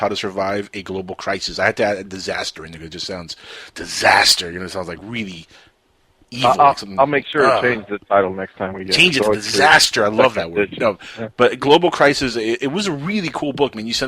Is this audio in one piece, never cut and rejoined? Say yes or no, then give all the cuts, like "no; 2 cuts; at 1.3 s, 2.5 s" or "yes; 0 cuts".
no; 1 cut; at 4.1 s